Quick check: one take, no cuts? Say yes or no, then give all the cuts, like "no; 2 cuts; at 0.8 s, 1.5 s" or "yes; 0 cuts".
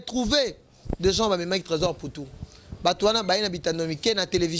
yes; 0 cuts